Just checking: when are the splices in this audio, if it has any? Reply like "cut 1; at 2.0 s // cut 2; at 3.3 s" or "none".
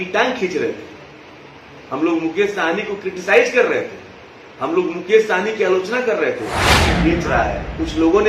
cut 1; at 6.9 s